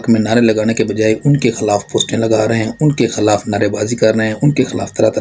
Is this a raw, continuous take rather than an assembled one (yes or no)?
yes